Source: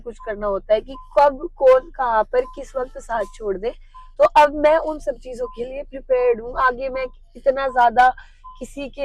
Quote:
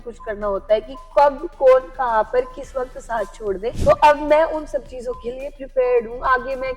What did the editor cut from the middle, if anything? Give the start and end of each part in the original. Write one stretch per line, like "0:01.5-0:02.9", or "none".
0:03.8-0:04.1